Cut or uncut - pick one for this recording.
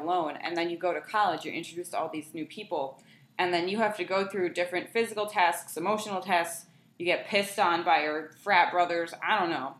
uncut